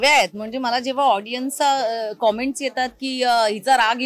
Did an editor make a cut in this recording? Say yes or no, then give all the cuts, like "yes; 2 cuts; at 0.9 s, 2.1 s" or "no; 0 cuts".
no; 0 cuts